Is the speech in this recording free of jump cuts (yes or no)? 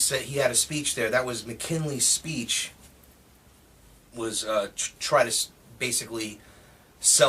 no